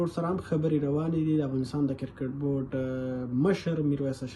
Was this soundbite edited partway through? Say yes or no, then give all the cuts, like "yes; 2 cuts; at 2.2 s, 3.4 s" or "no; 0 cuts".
no; 0 cuts